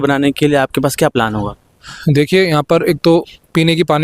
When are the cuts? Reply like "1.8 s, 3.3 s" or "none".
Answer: none